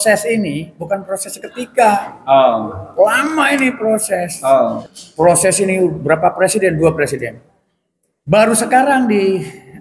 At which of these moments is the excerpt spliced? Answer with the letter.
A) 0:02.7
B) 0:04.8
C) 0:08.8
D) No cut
B